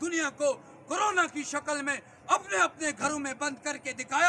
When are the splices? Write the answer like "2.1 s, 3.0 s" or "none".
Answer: none